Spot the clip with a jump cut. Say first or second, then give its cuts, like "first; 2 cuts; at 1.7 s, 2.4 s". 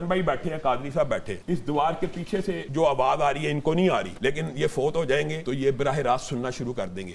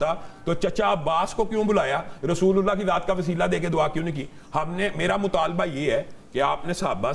first; 4 cuts; at 1.3 s, 2.6 s, 4.1 s, 5.4 s